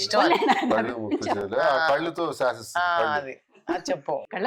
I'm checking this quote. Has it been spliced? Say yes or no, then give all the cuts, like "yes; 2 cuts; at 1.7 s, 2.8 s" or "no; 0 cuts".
no; 0 cuts